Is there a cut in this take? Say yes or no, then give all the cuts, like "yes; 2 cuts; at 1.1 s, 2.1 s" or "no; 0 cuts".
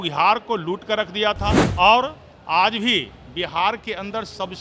yes; 1 cut; at 1.6 s